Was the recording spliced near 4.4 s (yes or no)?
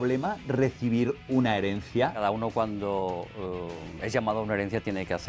no